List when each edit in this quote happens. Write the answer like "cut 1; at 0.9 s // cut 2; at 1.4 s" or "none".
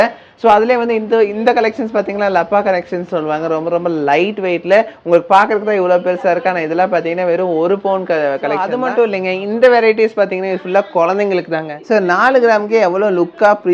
cut 1; at 8.7 s // cut 2; at 11.7 s